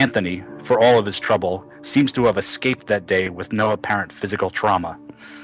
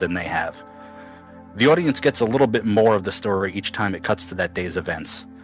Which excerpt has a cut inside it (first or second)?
second